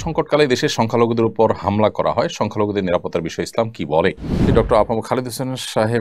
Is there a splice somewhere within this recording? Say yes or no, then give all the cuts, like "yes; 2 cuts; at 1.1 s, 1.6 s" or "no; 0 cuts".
yes; 1 cut; at 4.5 s